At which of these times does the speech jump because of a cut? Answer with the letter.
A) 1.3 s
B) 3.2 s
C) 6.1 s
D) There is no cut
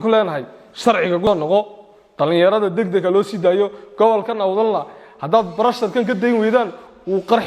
A